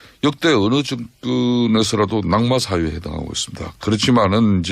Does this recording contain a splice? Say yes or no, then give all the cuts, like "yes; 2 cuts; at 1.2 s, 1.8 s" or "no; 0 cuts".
yes; 1 cut; at 2.5 s